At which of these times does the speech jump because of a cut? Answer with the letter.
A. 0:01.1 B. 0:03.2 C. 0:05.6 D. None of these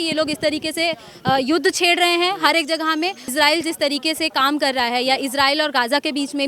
B